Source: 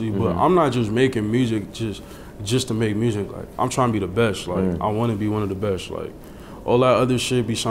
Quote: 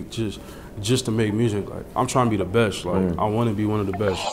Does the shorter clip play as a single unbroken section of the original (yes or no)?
yes